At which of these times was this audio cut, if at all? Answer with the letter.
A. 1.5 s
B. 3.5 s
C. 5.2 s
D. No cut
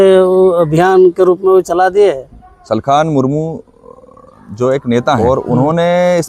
C